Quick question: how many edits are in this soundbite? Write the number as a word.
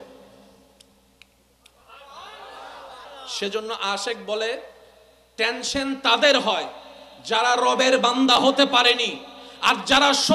one